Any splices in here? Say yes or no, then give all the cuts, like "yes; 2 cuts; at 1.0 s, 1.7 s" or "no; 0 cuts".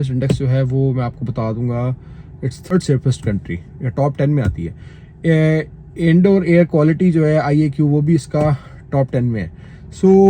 yes; 1 cut; at 2.7 s